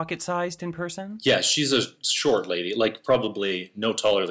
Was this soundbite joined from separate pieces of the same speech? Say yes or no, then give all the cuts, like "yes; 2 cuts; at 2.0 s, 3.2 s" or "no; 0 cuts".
yes; 1 cut; at 1.1 s